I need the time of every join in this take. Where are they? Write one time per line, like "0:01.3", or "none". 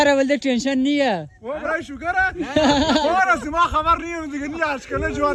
none

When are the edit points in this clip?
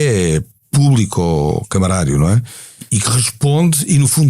0:02.9

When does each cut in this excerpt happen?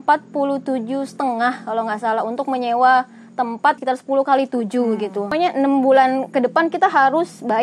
0:03.8
0:05.3

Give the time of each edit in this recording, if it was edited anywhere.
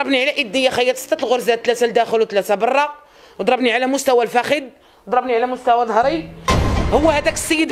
0:06.4

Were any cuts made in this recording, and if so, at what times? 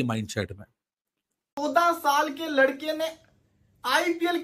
0:01.5

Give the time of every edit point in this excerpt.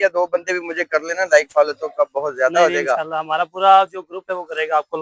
none

